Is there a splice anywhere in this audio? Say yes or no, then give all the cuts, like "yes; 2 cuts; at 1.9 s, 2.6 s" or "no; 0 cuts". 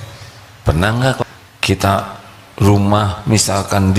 yes; 1 cut; at 1.2 s